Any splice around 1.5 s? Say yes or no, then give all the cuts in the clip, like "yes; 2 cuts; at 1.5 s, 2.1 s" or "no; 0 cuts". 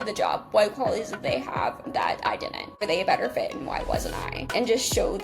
no; 2 cuts; at 2.8 s, 4.5 s